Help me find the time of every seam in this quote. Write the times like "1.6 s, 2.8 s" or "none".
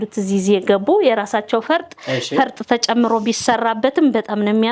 none